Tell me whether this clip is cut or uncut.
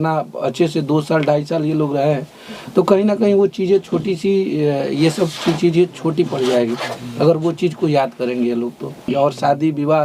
cut